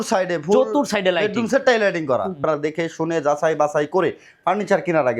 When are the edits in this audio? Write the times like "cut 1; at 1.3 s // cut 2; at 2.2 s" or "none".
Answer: cut 1; at 2.4 s